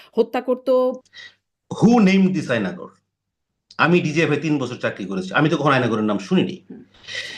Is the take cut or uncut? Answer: cut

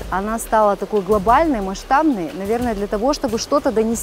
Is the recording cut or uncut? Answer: uncut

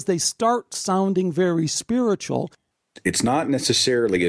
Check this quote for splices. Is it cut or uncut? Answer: cut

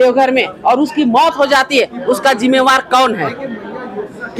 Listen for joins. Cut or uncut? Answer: uncut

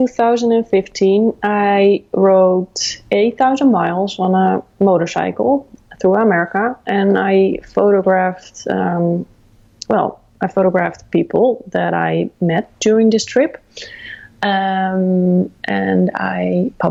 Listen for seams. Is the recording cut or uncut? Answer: uncut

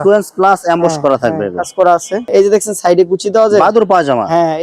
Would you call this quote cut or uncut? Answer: cut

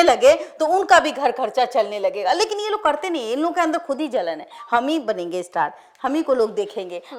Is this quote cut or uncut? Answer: uncut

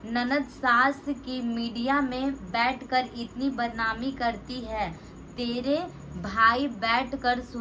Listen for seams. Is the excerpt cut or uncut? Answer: uncut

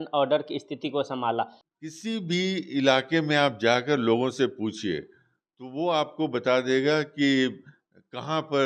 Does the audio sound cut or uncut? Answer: cut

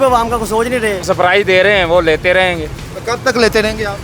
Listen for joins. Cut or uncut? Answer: cut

